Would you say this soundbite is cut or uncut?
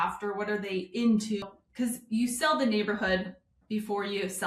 cut